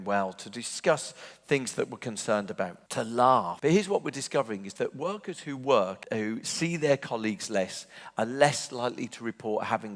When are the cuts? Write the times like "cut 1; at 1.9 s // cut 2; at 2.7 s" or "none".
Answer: cut 1; at 2.8 s // cut 2; at 3.5 s // cut 3; at 6.0 s